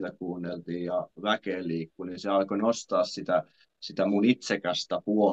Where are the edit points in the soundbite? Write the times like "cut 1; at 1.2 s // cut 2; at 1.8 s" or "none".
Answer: none